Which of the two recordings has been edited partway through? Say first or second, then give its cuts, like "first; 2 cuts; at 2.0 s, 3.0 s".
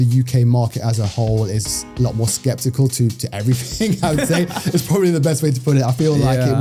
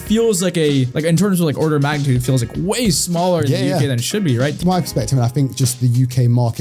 second; 2 cuts; at 0.9 s, 4.6 s